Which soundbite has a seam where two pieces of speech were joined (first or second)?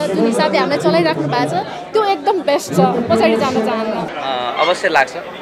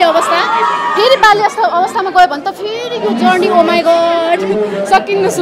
first